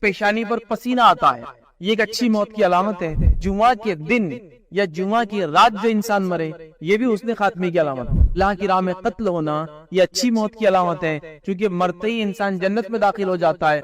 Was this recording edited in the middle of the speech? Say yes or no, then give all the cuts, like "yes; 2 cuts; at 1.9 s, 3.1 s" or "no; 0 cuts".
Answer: yes; 2 cuts; at 3.4 s, 8.3 s